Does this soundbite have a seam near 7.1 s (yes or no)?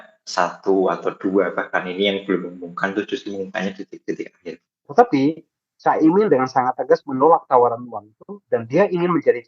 no